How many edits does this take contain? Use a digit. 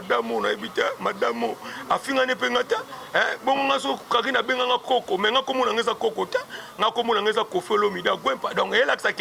0